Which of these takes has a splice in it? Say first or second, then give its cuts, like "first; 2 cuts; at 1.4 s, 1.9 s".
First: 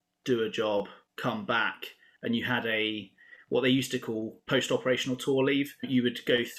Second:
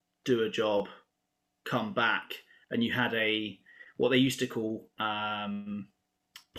first; 3 cuts; at 1.0 s, 4.4 s, 5.8 s